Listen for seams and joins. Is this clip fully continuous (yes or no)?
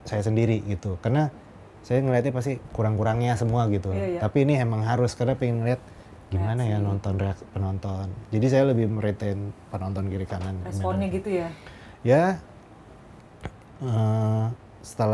yes